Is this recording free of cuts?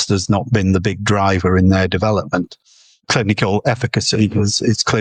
yes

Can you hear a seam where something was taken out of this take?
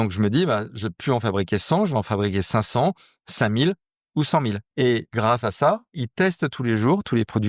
yes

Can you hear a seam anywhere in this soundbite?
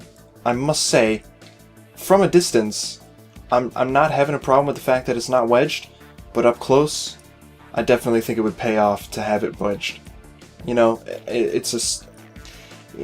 yes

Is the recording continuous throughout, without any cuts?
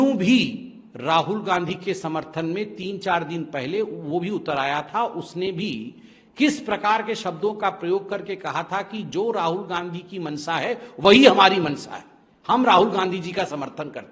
yes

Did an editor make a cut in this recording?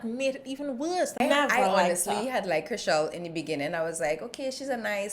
yes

